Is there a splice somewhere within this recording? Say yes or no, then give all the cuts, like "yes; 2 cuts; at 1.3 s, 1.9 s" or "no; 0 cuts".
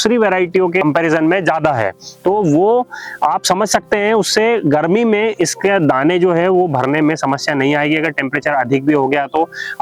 no; 0 cuts